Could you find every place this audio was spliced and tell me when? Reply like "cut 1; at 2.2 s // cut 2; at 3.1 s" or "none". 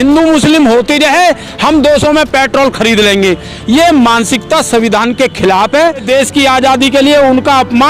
cut 1; at 6.0 s